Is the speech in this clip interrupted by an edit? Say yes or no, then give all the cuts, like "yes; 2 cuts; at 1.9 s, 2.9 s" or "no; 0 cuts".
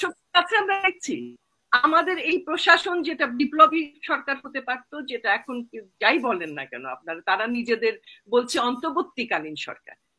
no; 0 cuts